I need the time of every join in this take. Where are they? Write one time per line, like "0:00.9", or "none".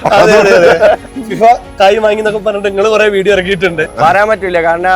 0:01.0
0:03.8